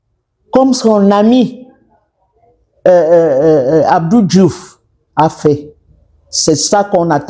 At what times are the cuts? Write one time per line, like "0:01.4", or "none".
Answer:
none